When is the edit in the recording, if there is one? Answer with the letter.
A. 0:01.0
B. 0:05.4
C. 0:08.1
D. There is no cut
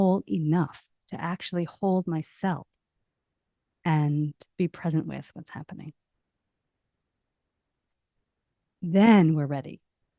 A